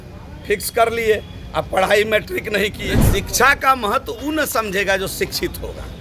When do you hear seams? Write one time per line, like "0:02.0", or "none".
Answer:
0:03.0